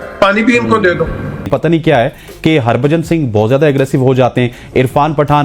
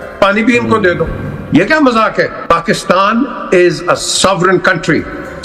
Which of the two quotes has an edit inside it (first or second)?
first